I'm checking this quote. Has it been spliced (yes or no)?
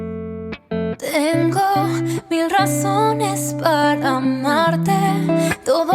yes